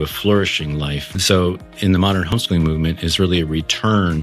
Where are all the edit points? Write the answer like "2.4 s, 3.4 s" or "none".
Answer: 1.0 s, 2.3 s